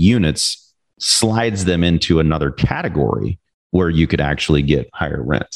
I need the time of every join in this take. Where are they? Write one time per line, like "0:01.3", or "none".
none